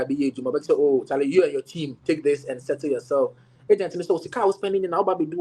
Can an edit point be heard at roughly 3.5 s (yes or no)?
yes